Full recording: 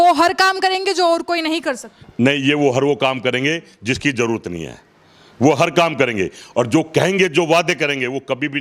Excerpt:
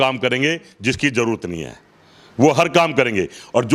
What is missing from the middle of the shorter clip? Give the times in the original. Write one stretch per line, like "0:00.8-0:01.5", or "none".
none